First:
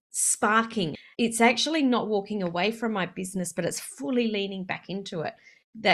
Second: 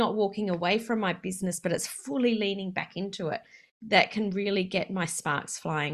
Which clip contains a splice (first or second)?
first